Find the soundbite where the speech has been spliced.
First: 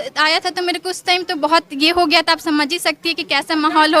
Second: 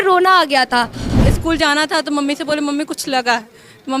second; 1 cut; at 1.0 s

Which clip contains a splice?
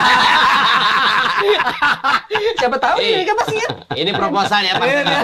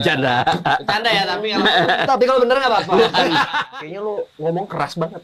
second; 1 cut; at 3.6 s

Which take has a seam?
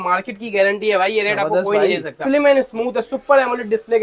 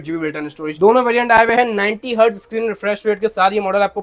first; 1 cut; at 2.2 s

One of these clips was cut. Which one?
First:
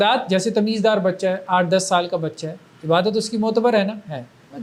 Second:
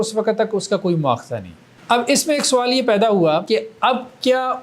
second; 1 cut; at 3.6 s

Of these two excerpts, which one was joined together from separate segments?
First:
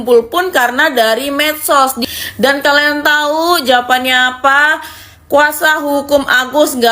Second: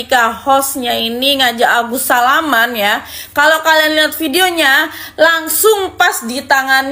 first; 1 cut; at 2.0 s

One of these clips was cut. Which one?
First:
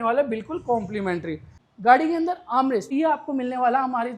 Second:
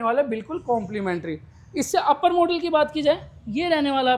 first; 2 cuts; at 1.5 s, 2.9 s

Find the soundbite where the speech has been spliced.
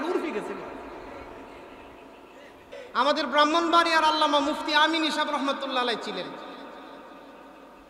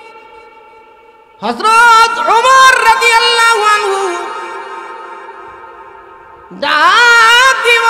first; 1 cut; at 2.7 s

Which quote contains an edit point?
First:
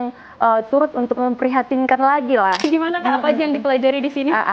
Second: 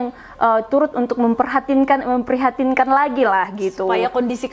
first; 2 cuts; at 1.1 s, 2.6 s

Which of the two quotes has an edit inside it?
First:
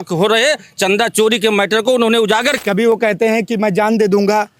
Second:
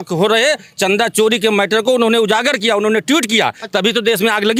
first; 1 cut; at 2.6 s

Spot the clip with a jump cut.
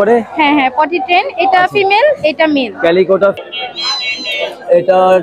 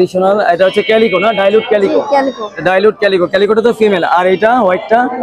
first; 1 cut; at 3.4 s

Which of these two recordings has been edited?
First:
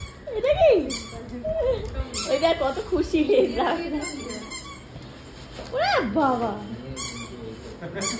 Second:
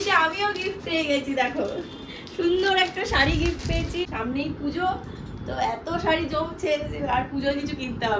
second; 1 cut; at 3.9 s

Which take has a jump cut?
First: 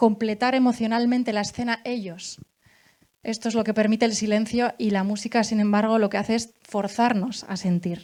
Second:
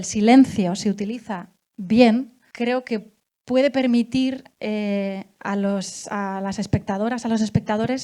second; 1 cut; at 2.4 s

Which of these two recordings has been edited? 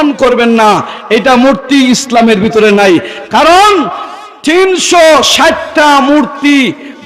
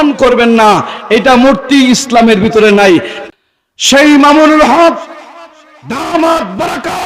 second; 1 cut; at 3.2 s

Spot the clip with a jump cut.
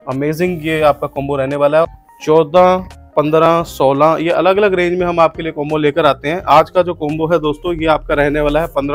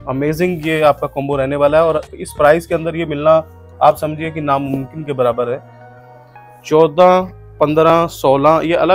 first; 1 cut; at 1.9 s

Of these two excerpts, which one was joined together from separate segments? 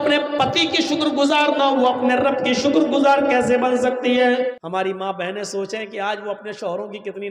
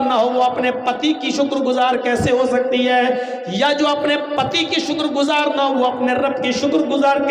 first; 1 cut; at 4.6 s

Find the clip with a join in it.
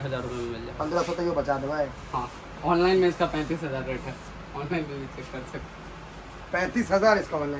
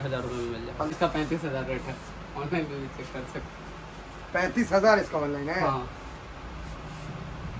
second; 1 cut; at 0.9 s

